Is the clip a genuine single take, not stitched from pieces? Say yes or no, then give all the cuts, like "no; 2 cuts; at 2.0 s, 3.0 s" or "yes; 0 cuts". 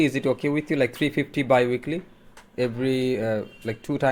yes; 0 cuts